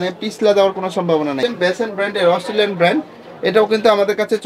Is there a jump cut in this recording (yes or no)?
yes